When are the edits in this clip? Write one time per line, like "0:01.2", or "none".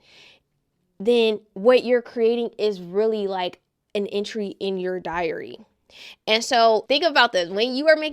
0:06.8